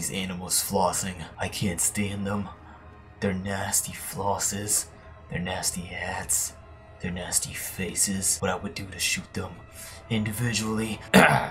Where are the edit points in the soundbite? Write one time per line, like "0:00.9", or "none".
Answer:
none